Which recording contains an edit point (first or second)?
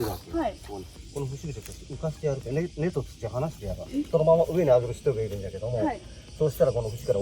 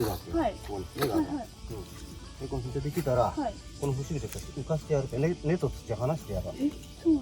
first